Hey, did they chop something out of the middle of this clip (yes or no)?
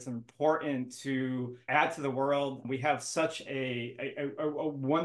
yes